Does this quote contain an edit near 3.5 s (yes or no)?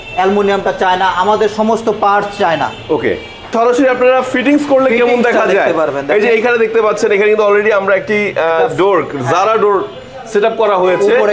yes